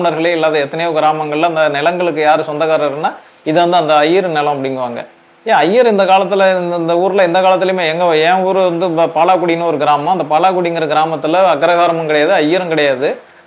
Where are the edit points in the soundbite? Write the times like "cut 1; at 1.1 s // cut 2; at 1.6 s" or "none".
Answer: none